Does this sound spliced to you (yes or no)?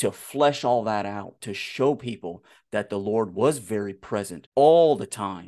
yes